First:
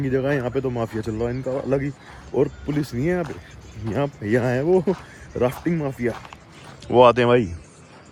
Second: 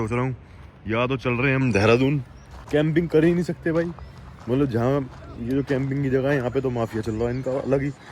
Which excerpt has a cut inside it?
second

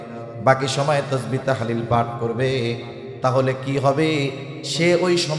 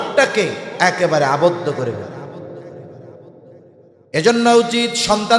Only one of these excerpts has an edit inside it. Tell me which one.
second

